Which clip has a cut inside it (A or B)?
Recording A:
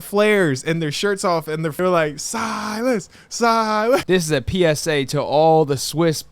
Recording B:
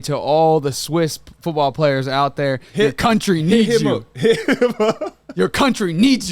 A